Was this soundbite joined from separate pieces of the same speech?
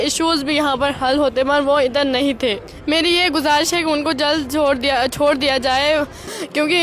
no; 0 cuts

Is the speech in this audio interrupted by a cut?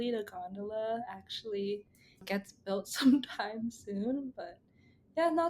yes; 1 cut; at 2.2 s

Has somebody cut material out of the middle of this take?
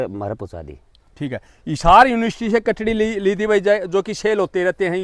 no; 0 cuts

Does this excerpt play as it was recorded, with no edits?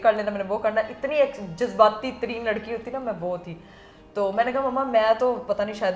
yes; 0 cuts

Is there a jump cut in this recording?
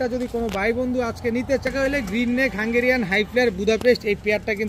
yes; 1 cut; at 1.7 s

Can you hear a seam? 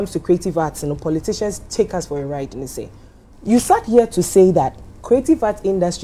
no; 0 cuts

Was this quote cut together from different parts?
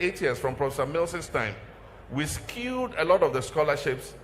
yes; 1 cut; at 3.2 s

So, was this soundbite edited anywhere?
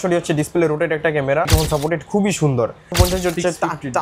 yes; 2 cuts; at 1.5 s, 2.9 s

